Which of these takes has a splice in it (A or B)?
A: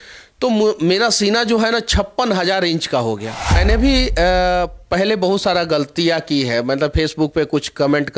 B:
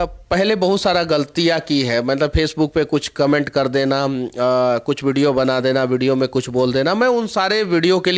A